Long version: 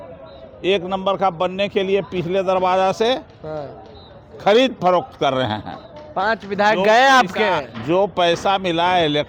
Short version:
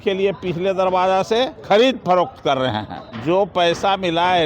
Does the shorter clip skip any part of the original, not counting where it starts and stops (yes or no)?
yes